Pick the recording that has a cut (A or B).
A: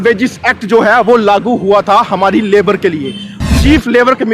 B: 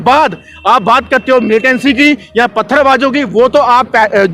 A